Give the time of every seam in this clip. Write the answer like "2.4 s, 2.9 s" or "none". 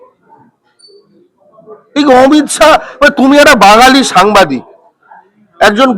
none